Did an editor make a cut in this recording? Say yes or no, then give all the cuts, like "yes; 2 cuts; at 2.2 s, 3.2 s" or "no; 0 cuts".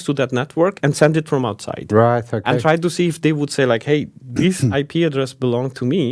no; 0 cuts